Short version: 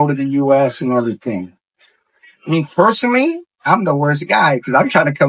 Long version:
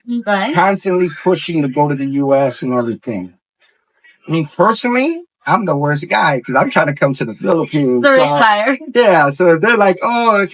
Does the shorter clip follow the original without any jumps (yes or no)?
yes